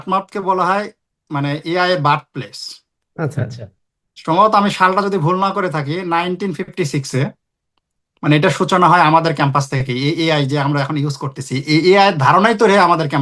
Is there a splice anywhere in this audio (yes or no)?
no